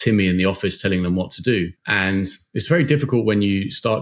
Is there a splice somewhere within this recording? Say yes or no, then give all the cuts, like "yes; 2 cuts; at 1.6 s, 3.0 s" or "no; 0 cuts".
yes; 1 cut; at 1.8 s